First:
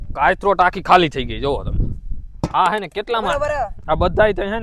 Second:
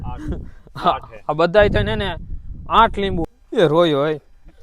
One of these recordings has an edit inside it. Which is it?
second; 1 cut; at 3.2 s

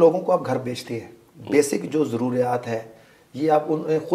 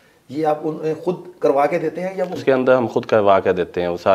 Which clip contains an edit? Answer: second; 1 cut; at 2.4 s

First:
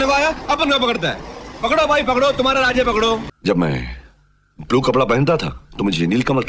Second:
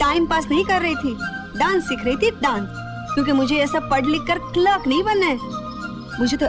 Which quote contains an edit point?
first; 1 cut; at 3.3 s

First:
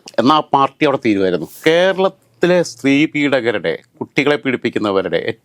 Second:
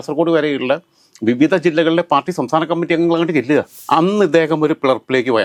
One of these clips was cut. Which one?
first; 1 cut; at 1.5 s

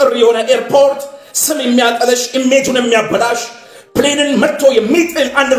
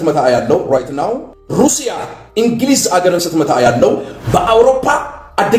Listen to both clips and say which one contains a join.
second; 1 cut; at 1.3 s

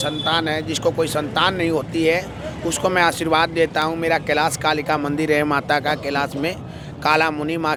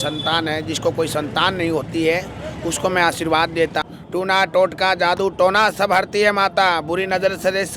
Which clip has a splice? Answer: second; 1 cut; at 3.8 s

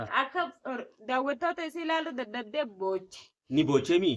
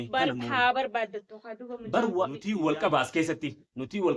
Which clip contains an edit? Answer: second; 1 cut; at 2.4 s

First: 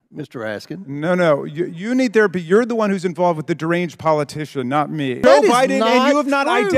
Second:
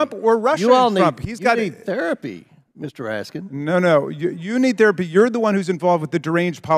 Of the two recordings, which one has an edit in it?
first; 1 cut; at 5.2 s

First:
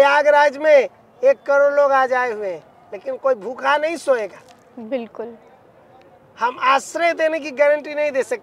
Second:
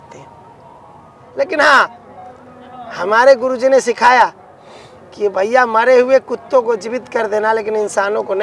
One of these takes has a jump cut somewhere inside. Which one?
second; 1 cut; at 1.2 s

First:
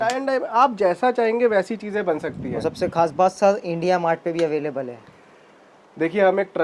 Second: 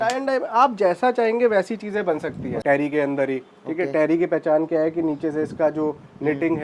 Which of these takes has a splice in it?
second; 1 cut; at 2.5 s

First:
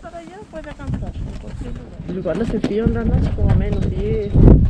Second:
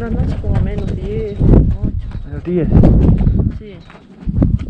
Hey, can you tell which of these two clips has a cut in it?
first; 1 cut; at 1.9 s

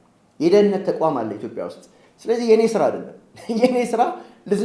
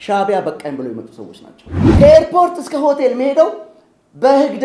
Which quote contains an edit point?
second; 1 cut; at 2.0 s

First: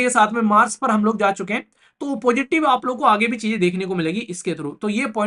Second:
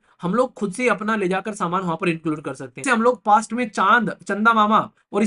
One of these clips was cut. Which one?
second; 1 cut; at 2.8 s

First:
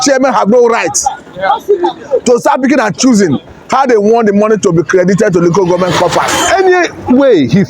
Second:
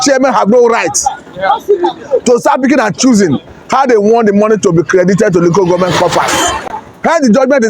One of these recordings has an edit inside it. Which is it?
first; 1 cut; at 6.4 s

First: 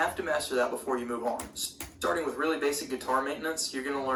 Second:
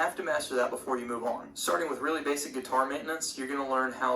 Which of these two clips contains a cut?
second; 1 cut; at 1.5 s

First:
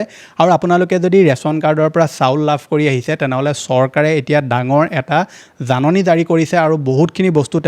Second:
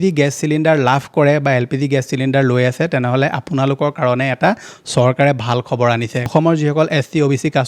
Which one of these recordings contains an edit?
second; 1 cut; at 6.2 s

